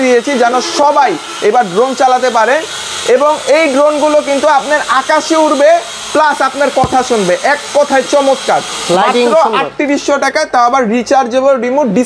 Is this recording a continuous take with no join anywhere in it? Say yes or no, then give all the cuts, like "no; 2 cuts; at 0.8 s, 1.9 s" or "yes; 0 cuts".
yes; 0 cuts